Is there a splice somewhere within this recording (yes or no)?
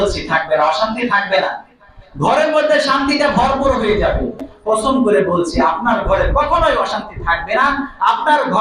yes